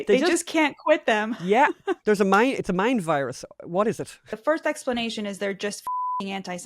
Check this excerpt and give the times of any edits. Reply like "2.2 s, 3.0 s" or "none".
2.0 s, 4.3 s